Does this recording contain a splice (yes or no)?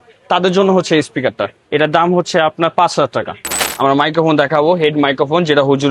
yes